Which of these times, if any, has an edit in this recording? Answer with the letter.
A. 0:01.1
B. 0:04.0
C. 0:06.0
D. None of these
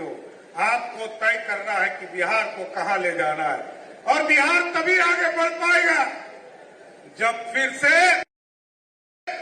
D